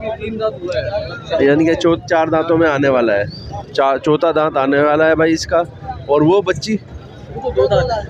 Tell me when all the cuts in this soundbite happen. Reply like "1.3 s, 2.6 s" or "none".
none